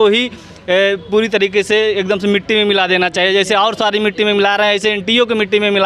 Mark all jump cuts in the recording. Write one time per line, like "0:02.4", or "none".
none